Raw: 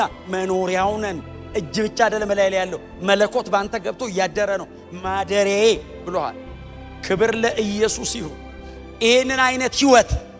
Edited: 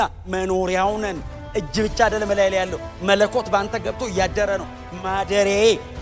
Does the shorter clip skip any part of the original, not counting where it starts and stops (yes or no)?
no